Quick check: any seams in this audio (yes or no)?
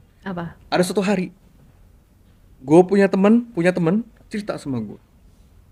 no